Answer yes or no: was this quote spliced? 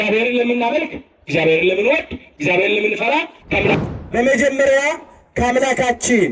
yes